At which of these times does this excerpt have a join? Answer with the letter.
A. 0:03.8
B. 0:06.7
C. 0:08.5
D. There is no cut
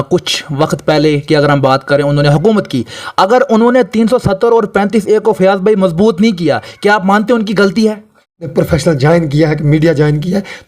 C